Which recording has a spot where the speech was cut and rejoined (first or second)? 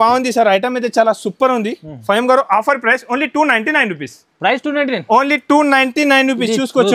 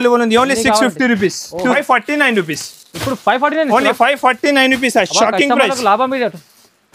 second